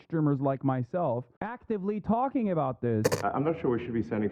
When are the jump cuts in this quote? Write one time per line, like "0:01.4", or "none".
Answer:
0:03.1